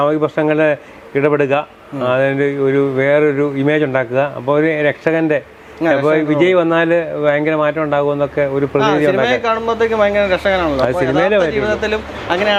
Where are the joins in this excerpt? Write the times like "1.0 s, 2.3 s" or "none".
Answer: none